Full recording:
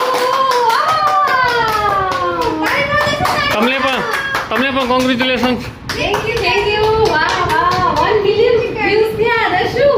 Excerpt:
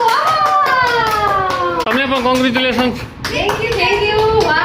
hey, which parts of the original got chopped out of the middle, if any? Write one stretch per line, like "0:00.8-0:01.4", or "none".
0:02.4-0:04.5